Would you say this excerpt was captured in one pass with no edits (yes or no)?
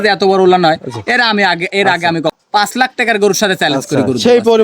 no